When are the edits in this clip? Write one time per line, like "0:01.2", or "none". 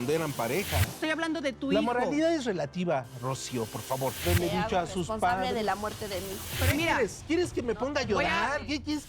0:00.9
0:04.2
0:06.6

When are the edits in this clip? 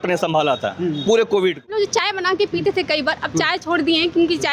0:01.8

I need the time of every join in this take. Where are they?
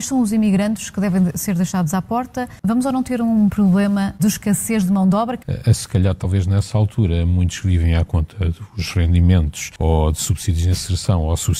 0:02.5
0:09.7

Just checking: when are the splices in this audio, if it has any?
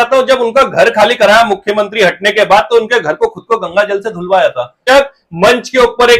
0:04.8

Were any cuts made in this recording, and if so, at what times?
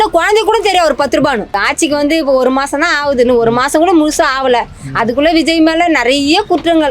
0:01.6

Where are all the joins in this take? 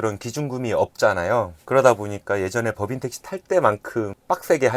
none

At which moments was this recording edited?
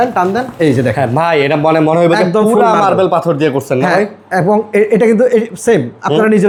none

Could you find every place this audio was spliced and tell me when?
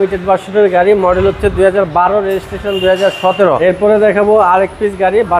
0:03.6

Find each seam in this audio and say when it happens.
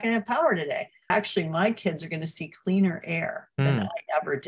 0:01.0

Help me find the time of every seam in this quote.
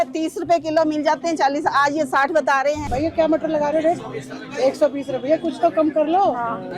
0:02.8

